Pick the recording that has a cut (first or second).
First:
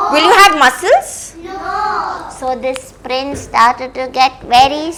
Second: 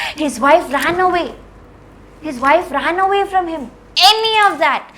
second